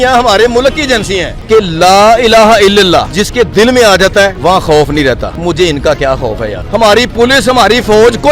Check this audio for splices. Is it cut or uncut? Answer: cut